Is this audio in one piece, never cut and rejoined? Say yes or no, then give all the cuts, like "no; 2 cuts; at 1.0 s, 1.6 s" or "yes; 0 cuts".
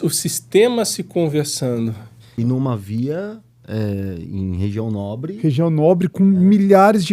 no; 1 cut; at 2.2 s